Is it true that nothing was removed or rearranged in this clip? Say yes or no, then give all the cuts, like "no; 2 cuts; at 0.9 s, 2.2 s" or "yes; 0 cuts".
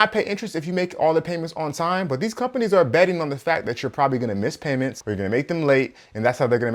yes; 0 cuts